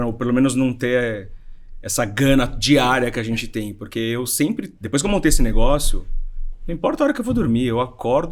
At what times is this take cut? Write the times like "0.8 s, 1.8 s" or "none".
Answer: none